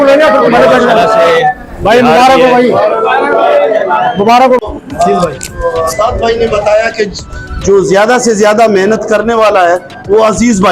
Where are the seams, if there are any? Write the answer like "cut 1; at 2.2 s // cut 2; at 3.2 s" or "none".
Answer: cut 1; at 4.6 s

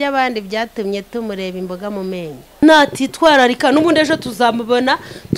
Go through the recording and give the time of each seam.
cut 1; at 2.6 s

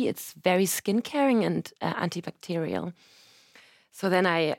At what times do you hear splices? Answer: none

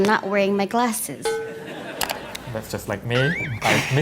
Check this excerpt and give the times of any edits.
cut 1; at 2.4 s

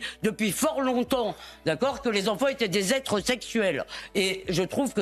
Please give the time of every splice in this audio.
none

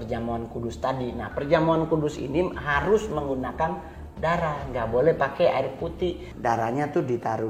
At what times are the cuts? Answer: cut 1; at 6.3 s

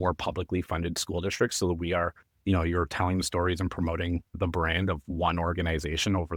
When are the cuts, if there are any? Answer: none

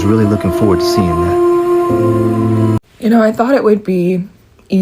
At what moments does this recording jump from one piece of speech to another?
cut 1; at 2.8 s

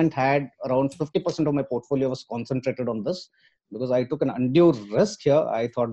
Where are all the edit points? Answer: none

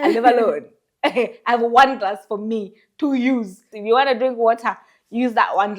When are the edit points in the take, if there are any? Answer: cut 1; at 3.7 s

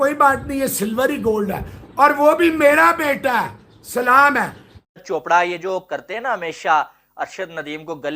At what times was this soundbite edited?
cut 1; at 5.0 s

